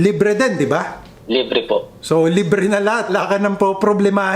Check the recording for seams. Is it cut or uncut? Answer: cut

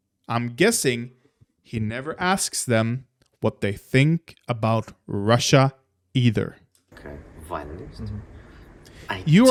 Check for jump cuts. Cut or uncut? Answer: uncut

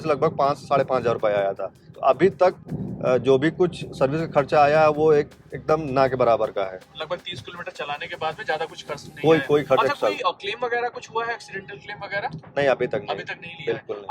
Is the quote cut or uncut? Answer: uncut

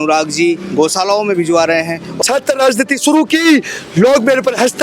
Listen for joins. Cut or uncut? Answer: cut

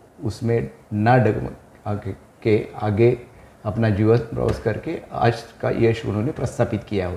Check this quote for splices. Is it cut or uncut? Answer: uncut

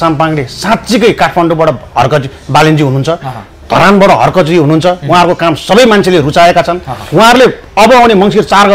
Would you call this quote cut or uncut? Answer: uncut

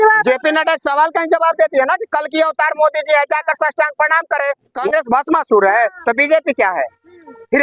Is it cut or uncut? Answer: cut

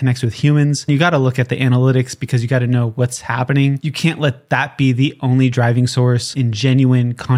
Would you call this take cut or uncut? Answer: cut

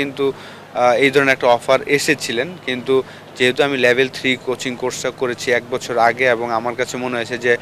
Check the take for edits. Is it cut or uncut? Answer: uncut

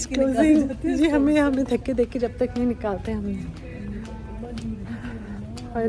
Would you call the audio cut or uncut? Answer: uncut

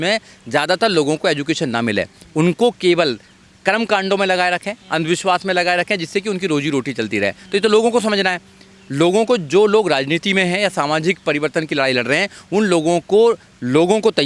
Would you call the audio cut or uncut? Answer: uncut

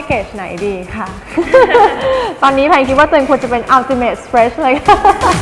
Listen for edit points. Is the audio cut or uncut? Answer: uncut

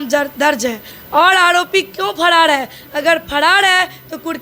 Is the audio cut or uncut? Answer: cut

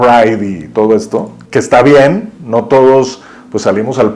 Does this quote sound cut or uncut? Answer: cut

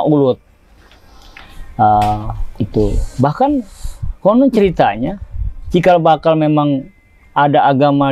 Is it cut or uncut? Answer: uncut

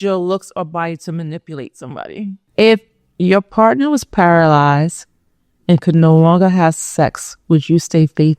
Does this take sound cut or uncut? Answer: cut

